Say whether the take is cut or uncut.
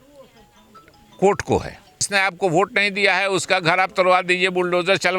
cut